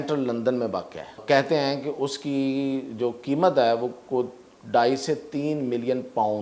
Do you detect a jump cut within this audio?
yes; 1 cut; at 1.2 s

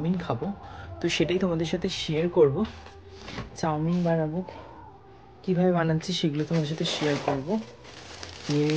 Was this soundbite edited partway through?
no; 0 cuts

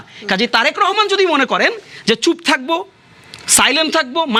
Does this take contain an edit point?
no; 0 cuts

